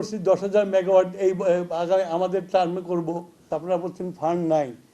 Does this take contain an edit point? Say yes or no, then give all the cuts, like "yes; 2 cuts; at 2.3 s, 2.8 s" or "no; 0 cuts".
yes; 1 cut; at 3.5 s